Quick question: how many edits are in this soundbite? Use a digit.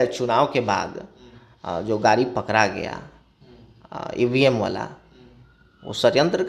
0